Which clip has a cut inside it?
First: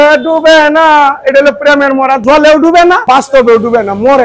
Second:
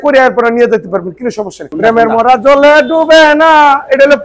second; 1 cut; at 1.7 s

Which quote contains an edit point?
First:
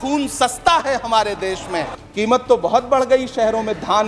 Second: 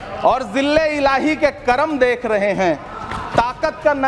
first; 1 cut; at 1.9 s

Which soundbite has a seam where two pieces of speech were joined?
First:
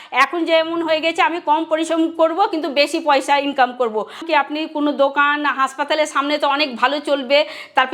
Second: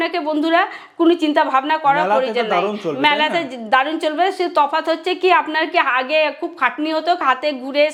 first; 1 cut; at 4.2 s

